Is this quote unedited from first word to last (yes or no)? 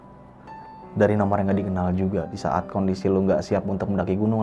no